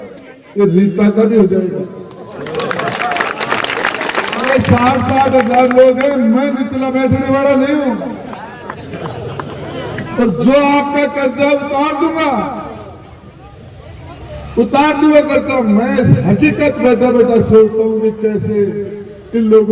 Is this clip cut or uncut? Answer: uncut